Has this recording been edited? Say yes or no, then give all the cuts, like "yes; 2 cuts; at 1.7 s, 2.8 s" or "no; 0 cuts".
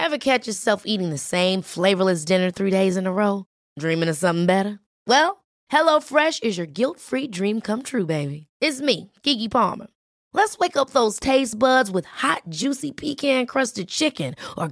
no; 0 cuts